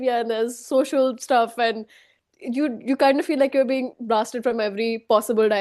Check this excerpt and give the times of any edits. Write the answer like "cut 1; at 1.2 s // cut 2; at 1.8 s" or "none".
none

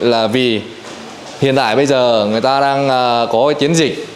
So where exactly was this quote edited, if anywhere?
none

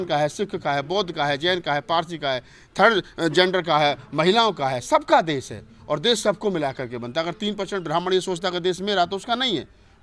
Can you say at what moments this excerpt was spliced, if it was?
none

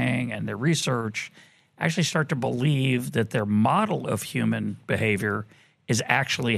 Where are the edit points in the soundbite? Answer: none

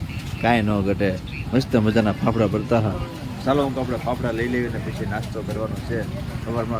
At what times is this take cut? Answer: none

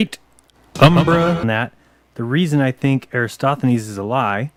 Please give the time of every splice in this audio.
none

